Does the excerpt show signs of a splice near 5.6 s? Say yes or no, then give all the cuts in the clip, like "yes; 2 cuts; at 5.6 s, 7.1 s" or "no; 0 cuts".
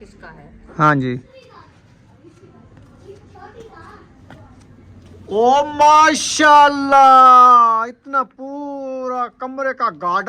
no; 1 cut; at 1.3 s